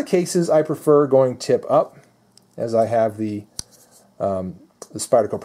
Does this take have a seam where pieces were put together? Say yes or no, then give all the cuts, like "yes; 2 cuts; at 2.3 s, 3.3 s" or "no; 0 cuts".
no; 0 cuts